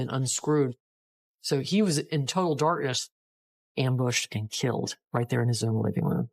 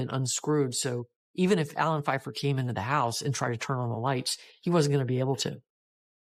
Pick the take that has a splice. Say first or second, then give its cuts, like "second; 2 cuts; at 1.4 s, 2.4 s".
first; 2 cuts; at 0.8 s, 3.5 s